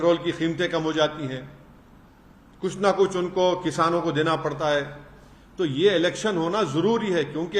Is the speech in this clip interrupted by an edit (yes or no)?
no